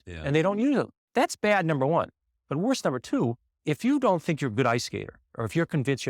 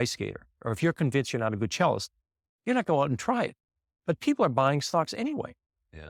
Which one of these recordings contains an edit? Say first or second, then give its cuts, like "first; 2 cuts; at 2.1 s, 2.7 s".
first; 2 cuts; at 1.0 s, 3.5 s